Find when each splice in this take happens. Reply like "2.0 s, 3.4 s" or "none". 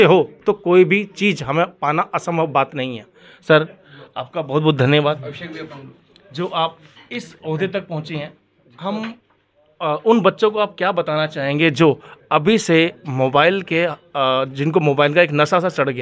none